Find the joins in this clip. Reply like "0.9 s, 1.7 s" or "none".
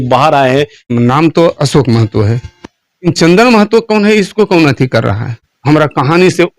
0.9 s, 5.5 s